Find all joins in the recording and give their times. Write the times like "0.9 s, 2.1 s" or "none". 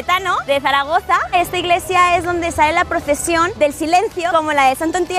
1.3 s, 3.5 s